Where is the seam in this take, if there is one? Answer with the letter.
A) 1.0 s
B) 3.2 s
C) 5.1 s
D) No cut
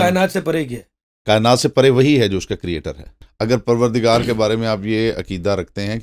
B